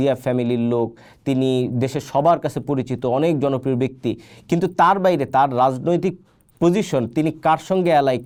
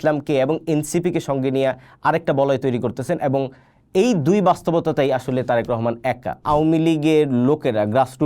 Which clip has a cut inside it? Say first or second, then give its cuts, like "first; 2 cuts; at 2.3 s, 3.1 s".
second; 1 cut; at 6.4 s